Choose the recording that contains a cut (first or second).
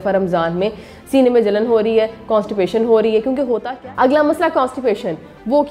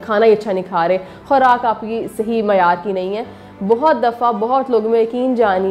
first